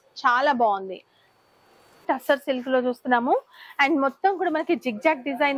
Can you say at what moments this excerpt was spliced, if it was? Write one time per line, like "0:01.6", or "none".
0:02.0

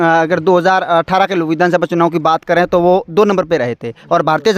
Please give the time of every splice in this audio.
none

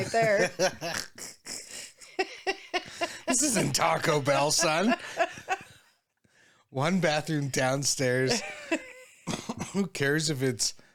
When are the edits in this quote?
none

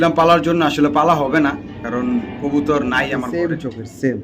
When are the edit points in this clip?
0:03.3

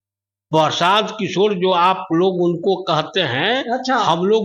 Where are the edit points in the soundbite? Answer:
none

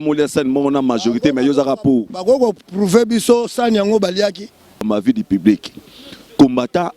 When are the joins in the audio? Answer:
0:04.8

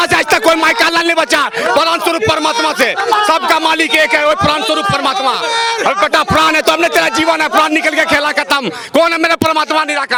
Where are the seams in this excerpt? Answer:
none

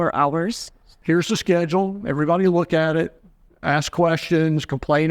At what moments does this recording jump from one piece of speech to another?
0:00.9

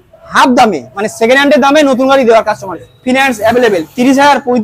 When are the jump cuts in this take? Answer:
0:02.8

